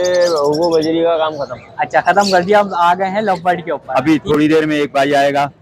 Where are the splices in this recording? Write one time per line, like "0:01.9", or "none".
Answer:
0:03.8